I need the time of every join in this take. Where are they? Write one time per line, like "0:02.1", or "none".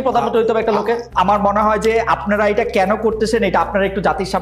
0:01.1